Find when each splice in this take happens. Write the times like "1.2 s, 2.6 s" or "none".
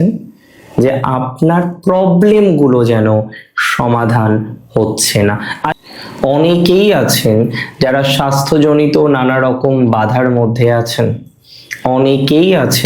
5.6 s